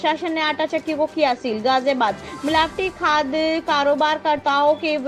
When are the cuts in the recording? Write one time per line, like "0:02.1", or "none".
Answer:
none